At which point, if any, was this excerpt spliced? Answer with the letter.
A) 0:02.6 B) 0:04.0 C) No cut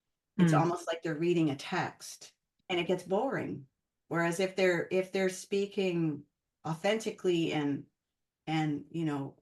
A